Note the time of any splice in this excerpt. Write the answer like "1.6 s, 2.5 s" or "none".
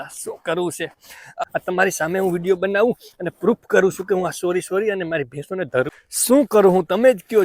1.4 s, 5.9 s